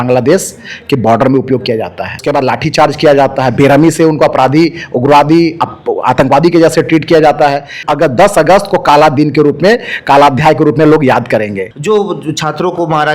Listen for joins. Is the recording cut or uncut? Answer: cut